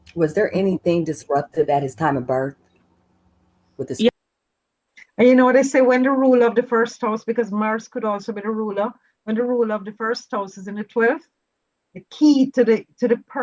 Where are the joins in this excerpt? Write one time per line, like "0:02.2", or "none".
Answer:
0:04.1